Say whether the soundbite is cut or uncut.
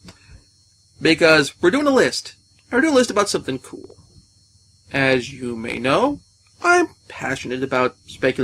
cut